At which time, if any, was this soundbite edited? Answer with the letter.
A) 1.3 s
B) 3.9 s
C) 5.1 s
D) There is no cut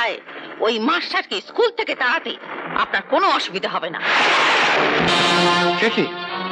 C